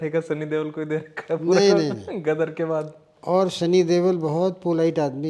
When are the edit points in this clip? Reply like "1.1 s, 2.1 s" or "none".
3.1 s